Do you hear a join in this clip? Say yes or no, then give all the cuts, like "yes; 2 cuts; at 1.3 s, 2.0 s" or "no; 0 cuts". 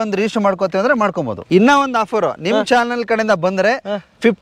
yes; 1 cut; at 1.3 s